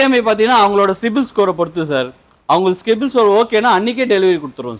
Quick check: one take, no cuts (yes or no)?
yes